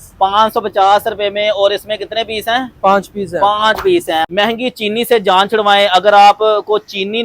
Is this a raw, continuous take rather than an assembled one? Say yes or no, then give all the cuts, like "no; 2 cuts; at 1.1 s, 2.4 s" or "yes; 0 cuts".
no; 1 cut; at 4.3 s